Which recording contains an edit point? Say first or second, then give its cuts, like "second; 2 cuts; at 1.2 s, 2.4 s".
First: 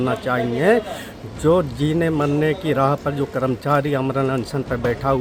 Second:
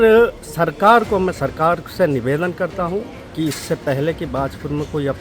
second; 1 cut; at 3.2 s